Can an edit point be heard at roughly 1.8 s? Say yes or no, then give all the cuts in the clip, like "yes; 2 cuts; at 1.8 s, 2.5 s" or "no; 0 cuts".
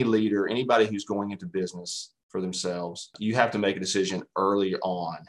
no; 1 cut; at 3.1 s